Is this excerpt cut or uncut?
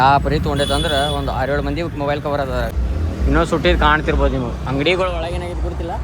cut